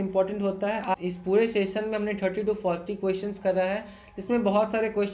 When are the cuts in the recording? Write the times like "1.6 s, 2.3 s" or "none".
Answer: 0.9 s